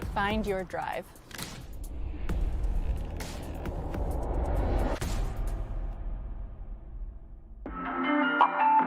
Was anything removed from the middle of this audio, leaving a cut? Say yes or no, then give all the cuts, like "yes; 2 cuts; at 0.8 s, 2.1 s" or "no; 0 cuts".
yes; 1 cut; at 7.6 s